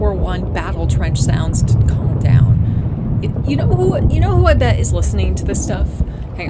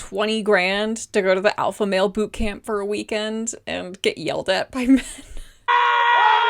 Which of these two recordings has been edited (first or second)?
second